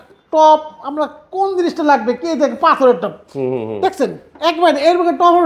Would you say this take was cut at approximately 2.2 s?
no; 0 cuts

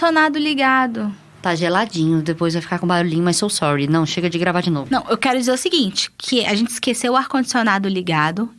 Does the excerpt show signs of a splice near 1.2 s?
yes; 2 cuts; at 1.2 s, 4.8 s

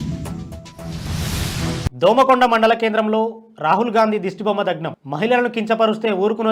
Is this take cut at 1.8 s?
yes; 1 cut; at 1.8 s

